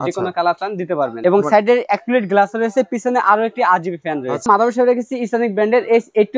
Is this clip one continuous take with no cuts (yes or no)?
no